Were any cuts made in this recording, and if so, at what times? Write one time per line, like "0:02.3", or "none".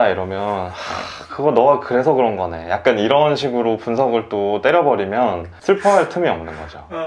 none